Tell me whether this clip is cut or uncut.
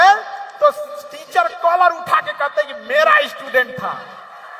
uncut